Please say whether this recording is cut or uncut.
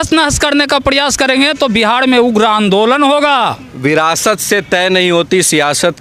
cut